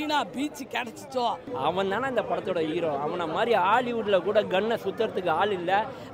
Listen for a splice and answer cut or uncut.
cut